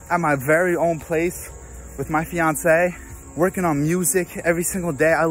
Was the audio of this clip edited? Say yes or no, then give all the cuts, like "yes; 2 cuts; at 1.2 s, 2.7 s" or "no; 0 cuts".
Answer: yes; 1 cut; at 3.2 s